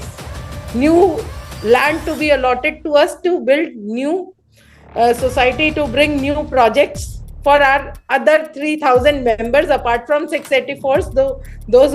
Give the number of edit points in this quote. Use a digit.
0